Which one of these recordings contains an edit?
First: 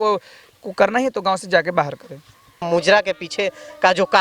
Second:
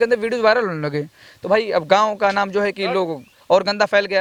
first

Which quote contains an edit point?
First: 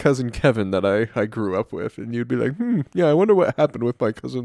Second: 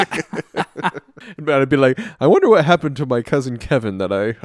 second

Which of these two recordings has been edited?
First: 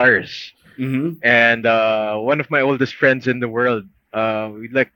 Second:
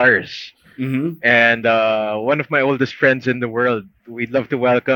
second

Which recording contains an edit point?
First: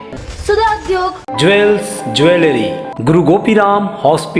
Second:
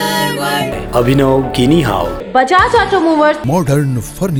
first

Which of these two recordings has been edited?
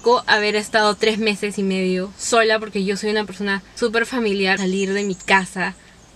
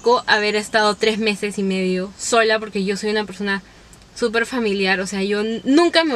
first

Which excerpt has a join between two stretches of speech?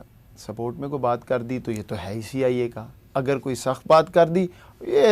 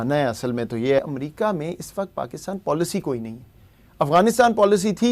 second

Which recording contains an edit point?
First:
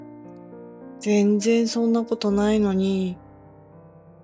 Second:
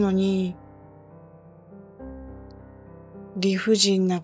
first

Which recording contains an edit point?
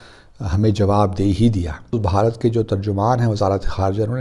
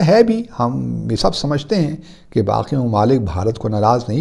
first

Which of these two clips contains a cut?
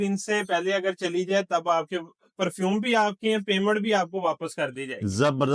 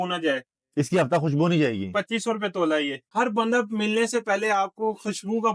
second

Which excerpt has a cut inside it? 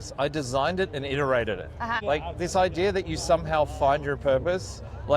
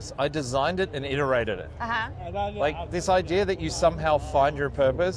first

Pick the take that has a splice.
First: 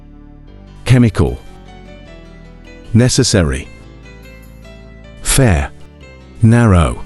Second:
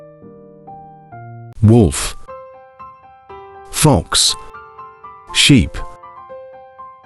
second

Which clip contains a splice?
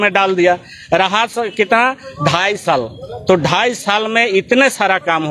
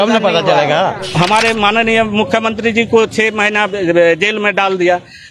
second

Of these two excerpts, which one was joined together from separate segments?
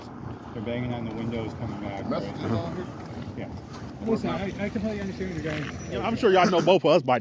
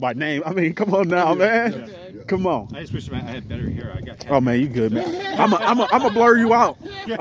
first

